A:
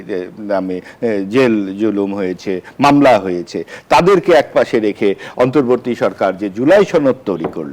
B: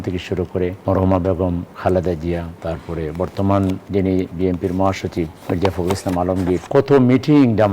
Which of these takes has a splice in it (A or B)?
B